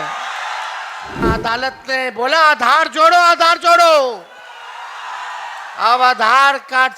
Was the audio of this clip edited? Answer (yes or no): yes